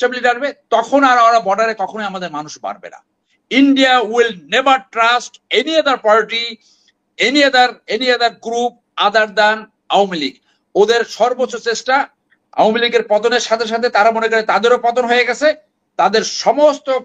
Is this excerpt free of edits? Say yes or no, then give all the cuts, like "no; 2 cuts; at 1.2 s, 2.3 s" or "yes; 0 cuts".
no; 1 cut; at 3.2 s